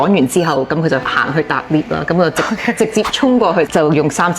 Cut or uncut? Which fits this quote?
cut